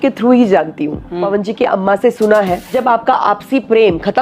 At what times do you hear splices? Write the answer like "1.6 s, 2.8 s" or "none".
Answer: 1.2 s, 2.7 s